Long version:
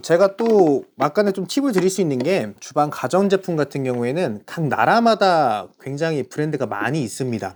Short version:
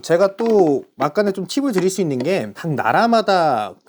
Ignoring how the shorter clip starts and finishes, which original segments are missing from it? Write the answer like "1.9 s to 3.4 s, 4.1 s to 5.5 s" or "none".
2.6 s to 4.5 s